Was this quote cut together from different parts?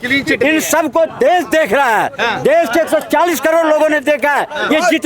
no; 0 cuts

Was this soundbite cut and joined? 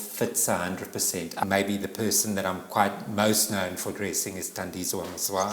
yes; 1 cut; at 1.4 s

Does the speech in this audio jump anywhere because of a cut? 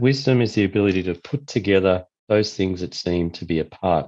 yes; 1 cut; at 2.1 s

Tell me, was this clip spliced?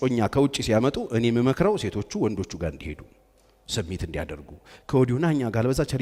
no; 0 cuts

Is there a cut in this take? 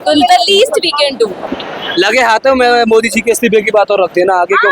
yes; 1 cut; at 1.4 s

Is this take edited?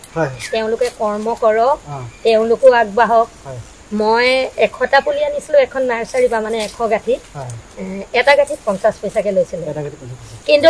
no; 0 cuts

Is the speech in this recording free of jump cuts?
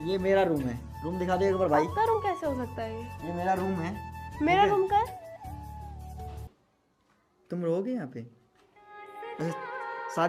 yes; 0 cuts

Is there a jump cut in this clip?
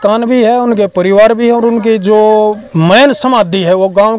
no; 0 cuts

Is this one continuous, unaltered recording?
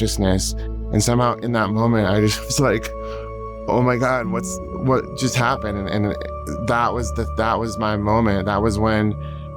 yes; 0 cuts

